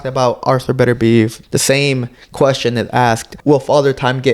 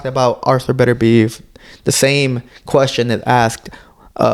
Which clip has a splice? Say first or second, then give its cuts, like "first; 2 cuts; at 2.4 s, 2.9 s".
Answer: first; 2 cuts; at 1.4 s, 3.3 s